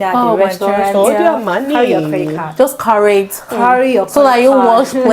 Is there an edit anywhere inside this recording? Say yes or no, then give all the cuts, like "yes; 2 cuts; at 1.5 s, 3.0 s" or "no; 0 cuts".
no; 0 cuts